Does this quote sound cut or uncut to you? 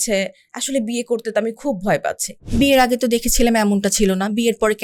cut